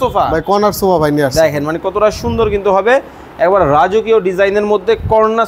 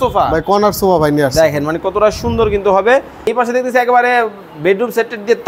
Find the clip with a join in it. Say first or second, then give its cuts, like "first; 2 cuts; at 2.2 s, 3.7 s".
second; 1 cut; at 3.3 s